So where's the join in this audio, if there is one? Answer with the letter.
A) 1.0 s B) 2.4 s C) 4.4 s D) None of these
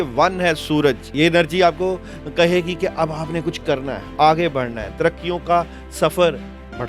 A